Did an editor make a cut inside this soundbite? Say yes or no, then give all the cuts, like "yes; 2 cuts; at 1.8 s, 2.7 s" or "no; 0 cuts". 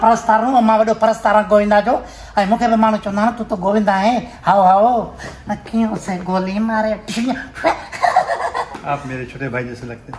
no; 0 cuts